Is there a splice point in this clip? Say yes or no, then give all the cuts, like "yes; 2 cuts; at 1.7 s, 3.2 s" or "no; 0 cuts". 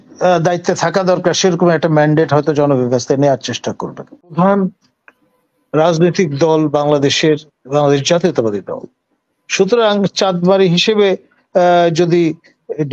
yes; 1 cut; at 4.3 s